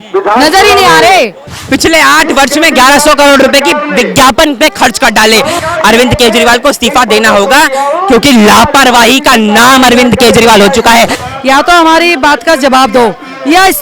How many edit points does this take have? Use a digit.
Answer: 3